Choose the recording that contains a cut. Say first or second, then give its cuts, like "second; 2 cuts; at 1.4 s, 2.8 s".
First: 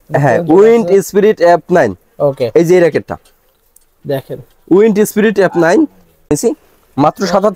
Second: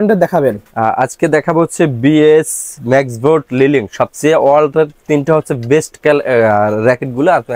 first; 1 cut; at 6.3 s